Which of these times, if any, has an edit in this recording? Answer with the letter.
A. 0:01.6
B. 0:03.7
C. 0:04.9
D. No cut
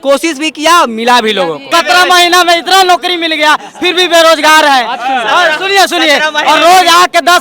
A